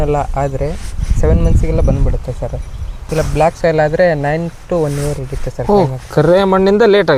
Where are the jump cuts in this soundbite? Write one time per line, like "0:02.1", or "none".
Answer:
none

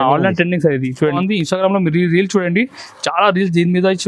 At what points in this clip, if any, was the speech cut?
0:01.2

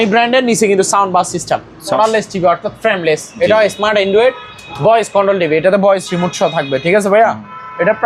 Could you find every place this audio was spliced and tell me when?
0:02.0

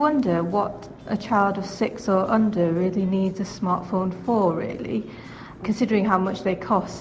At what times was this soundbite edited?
0:01.0
0:05.6

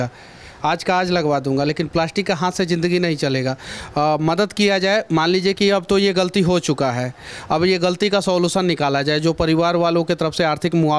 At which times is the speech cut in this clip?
none

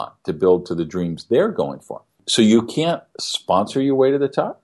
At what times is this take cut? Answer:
0:02.2

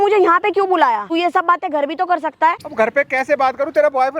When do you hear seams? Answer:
0:01.1
0:02.6

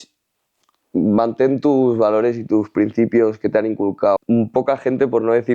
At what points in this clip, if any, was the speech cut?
0:04.2

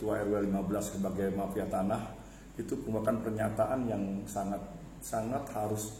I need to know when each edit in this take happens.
none

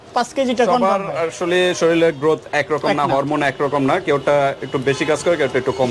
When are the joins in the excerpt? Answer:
none

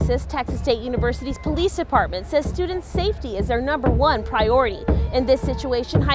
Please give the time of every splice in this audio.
none

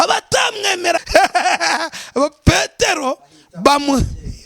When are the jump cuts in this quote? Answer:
0:01.0

